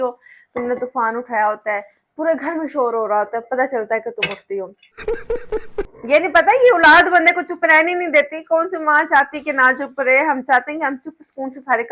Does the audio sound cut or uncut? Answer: cut